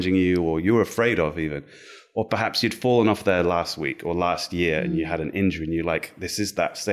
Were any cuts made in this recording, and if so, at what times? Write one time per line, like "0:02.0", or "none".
none